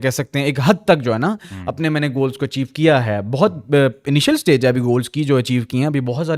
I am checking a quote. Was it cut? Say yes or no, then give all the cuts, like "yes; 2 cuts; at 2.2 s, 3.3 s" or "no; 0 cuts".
no; 0 cuts